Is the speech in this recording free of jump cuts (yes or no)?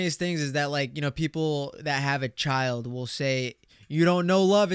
yes